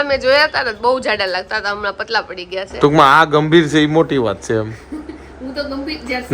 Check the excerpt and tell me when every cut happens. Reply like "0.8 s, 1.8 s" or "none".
2.7 s